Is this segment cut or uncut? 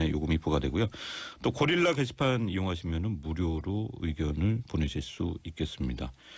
cut